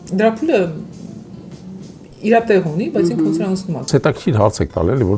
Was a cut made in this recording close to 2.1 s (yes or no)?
no